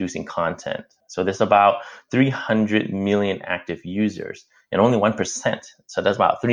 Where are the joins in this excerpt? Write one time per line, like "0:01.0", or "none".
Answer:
0:01.0